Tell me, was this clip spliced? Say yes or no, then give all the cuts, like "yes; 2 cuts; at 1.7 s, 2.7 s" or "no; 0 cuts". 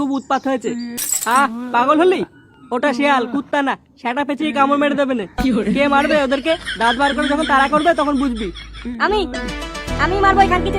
yes; 1 cut; at 1.1 s